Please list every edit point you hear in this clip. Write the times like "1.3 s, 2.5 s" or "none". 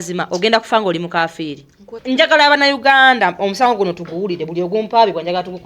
1.9 s